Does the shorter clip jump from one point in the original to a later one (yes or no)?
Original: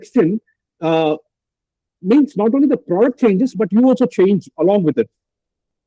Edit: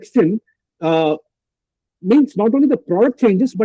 no